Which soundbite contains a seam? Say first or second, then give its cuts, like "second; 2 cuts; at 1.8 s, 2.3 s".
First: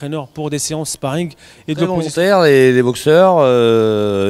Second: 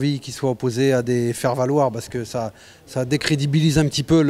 first; 1 cut; at 2.0 s